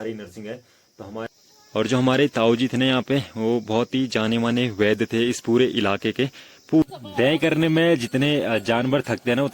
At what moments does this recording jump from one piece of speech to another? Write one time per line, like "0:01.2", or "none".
0:01.3
0:06.8